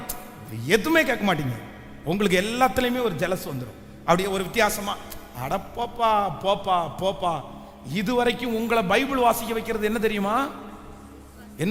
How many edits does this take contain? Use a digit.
0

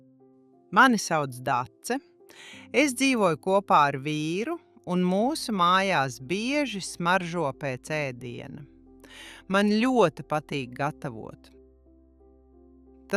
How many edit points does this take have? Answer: 0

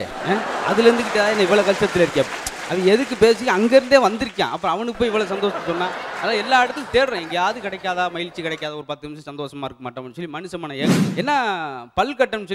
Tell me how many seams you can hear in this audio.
1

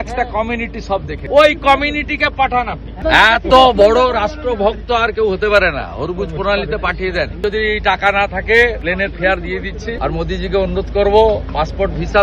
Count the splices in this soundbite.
5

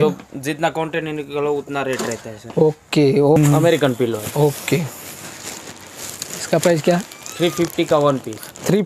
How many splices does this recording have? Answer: 1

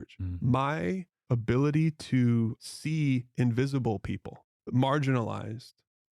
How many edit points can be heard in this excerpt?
3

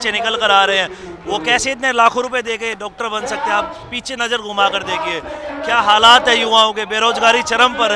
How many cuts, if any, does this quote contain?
0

